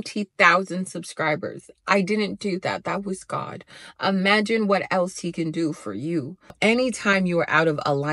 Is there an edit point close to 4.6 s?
no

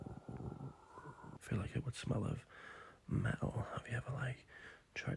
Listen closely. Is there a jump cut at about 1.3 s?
yes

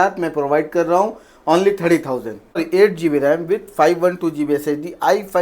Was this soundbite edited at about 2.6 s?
yes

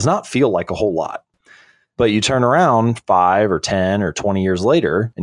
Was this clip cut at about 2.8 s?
no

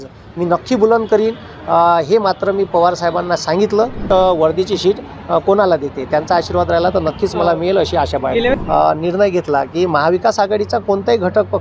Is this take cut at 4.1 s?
yes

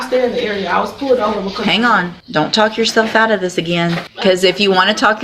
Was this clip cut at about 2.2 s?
yes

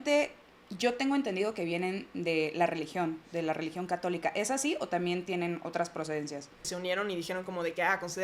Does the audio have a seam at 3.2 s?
no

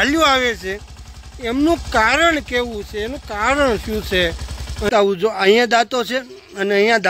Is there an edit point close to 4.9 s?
yes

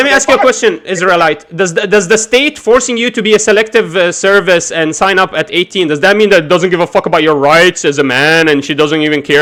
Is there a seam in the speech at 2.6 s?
no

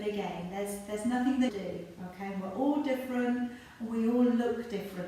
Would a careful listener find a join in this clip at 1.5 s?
yes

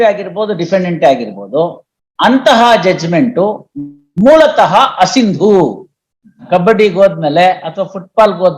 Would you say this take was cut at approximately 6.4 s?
yes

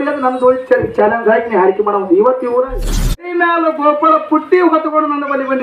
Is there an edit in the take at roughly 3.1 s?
yes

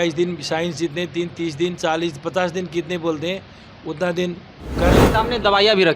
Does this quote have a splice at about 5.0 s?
yes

